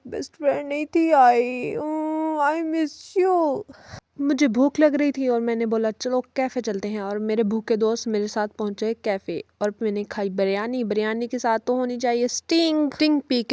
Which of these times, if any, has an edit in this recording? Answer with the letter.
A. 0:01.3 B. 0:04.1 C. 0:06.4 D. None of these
D